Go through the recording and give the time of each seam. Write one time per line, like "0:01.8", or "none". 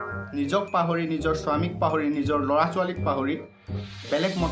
none